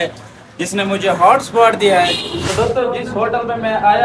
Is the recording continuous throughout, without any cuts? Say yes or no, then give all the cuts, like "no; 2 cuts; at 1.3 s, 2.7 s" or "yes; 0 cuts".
no; 1 cut; at 2.3 s